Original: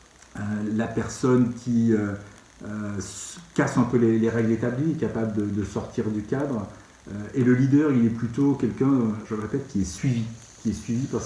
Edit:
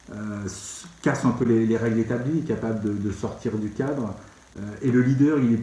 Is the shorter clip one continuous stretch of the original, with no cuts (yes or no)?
yes